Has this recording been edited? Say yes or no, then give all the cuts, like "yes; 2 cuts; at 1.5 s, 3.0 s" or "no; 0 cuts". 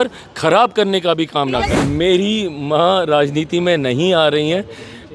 yes; 1 cut; at 1.7 s